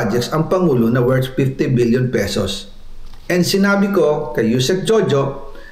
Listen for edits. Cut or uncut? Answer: uncut